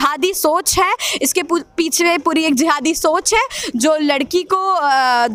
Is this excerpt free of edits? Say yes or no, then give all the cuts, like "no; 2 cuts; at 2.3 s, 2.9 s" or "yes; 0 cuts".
yes; 0 cuts